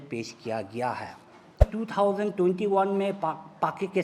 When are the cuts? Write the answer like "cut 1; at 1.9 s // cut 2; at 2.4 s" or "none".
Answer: cut 1; at 1.7 s